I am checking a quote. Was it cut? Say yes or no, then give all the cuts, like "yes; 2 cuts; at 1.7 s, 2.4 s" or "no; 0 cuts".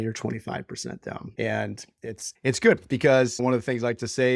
yes; 3 cuts; at 1.3 s, 2.2 s, 3.4 s